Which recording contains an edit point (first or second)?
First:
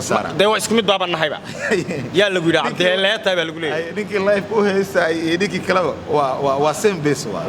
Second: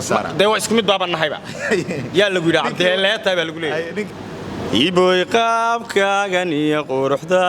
second